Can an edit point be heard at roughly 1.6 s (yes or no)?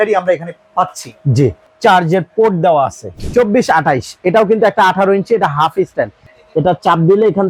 yes